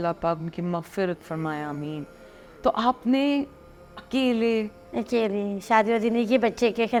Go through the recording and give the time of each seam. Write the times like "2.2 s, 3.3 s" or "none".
none